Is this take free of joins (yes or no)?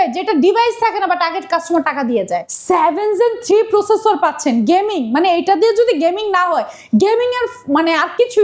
no